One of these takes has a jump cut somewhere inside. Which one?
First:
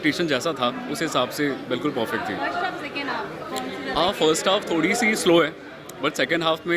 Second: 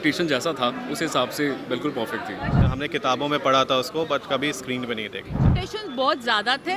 second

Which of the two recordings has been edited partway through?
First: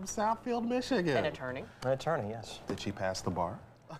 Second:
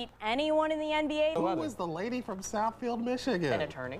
second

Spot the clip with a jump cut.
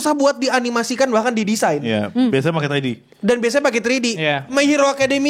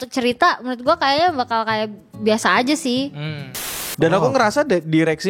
second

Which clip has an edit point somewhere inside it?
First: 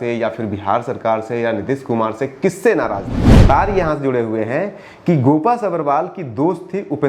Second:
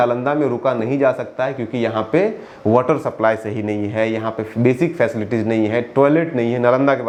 first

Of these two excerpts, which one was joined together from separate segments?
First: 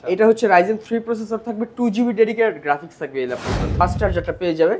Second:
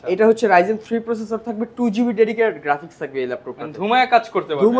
first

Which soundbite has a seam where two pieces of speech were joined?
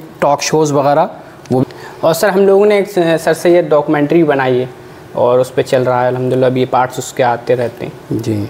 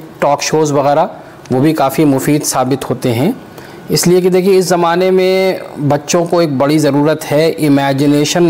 first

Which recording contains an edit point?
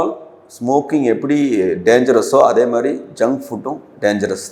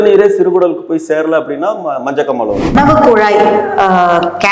second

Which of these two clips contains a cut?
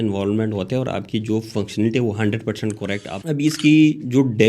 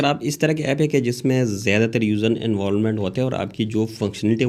first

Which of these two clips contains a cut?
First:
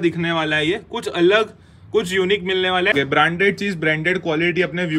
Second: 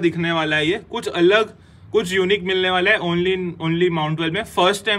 first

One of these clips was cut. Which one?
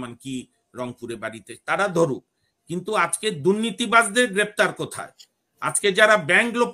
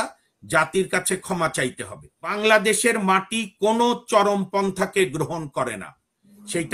second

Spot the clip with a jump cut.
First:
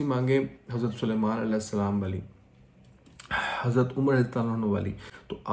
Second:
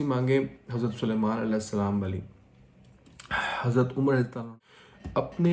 second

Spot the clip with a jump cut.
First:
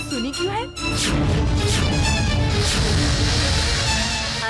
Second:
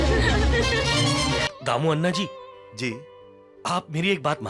second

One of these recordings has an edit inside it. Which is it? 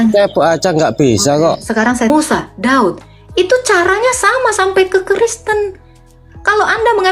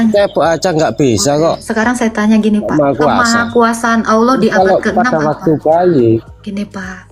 first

